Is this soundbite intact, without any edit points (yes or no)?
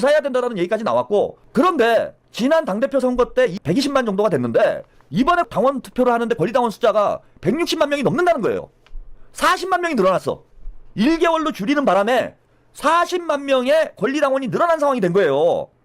no